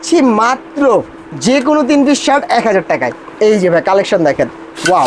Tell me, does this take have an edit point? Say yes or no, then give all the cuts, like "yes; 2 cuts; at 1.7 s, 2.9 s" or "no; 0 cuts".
yes; 1 cut; at 3.2 s